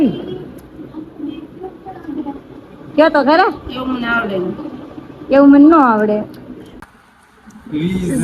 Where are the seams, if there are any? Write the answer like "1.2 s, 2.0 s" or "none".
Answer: 6.7 s